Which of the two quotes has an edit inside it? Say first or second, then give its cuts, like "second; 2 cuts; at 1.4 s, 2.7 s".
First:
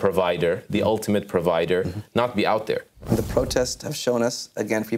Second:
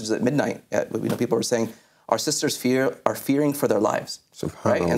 first; 1 cut; at 3.1 s